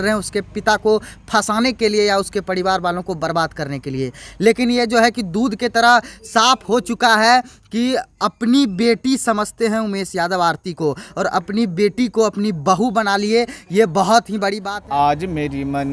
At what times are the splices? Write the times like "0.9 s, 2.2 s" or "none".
14.7 s

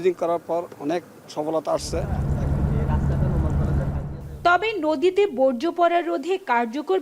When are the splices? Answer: none

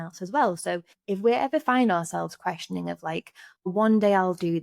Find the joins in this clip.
0.9 s, 3.7 s

